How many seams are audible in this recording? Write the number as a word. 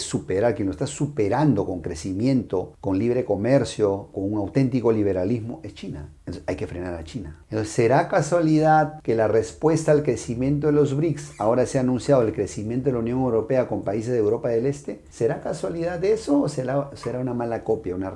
zero